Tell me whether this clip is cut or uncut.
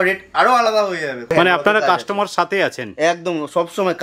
cut